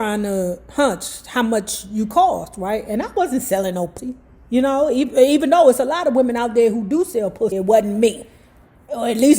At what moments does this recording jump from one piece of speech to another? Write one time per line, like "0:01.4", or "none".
0:04.0
0:07.5